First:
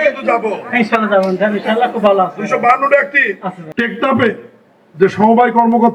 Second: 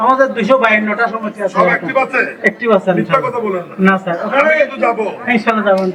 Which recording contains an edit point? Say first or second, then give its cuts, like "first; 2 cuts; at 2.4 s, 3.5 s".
first; 1 cut; at 3.5 s